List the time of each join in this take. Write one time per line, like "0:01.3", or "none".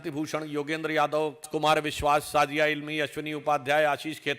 0:01.5